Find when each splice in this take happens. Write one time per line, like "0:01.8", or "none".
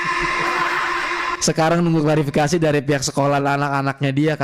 0:01.4

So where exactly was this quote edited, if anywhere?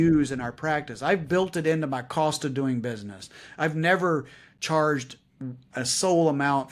none

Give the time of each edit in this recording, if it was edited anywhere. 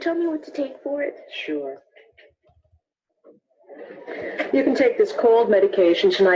0:01.5

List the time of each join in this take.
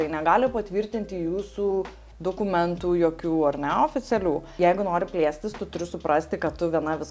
0:04.5

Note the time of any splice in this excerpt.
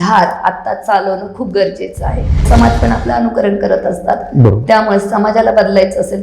0:02.4

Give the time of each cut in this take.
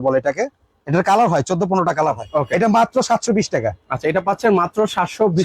0:02.2

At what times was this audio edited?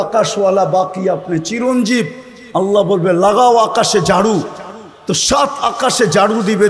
none

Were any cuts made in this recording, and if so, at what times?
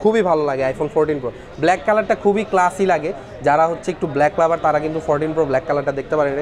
none

